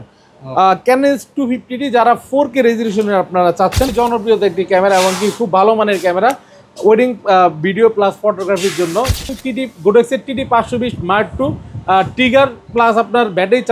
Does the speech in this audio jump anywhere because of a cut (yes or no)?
yes